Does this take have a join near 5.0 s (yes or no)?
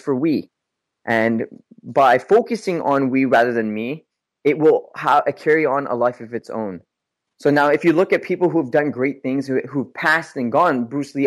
no